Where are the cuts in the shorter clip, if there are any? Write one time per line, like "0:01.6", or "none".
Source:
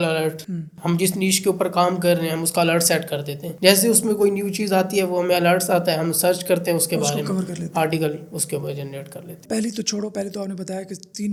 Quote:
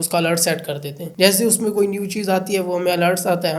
none